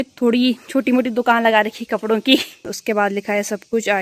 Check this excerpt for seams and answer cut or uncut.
cut